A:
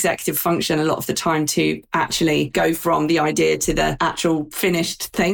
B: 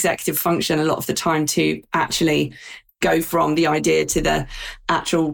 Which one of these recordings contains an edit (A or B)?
A